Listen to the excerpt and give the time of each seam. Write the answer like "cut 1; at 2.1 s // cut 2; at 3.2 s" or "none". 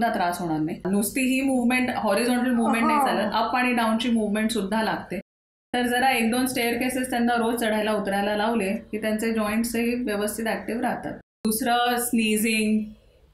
cut 1; at 0.8 s // cut 2; at 11.4 s